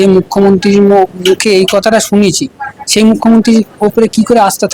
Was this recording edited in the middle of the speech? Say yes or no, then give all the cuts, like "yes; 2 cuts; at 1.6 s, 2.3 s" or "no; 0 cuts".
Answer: no; 0 cuts